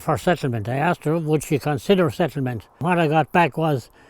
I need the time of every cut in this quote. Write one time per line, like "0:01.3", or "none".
0:02.8